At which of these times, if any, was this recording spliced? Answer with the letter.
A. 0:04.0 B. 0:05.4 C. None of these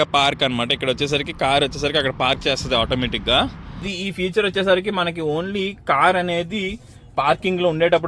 A